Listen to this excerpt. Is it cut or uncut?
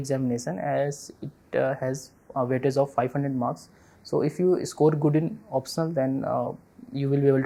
uncut